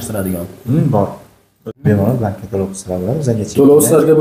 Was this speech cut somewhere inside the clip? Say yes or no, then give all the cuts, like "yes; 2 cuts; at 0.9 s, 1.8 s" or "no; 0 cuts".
yes; 1 cut; at 1.5 s